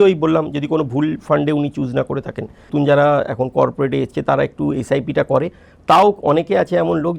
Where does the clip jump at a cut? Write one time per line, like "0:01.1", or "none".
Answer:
0:02.7